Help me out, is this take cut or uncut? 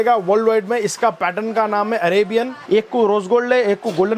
cut